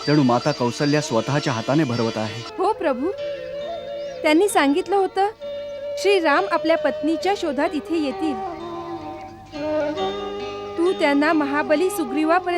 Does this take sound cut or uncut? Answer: cut